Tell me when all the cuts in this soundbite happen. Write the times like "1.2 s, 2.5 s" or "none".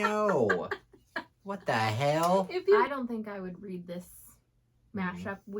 2.8 s